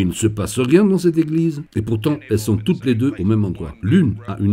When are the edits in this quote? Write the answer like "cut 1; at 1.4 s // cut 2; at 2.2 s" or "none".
cut 1; at 1.6 s